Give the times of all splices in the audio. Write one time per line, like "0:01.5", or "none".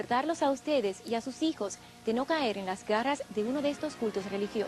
0:03.2